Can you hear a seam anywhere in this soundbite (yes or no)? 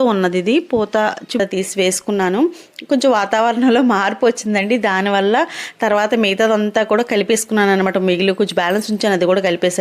yes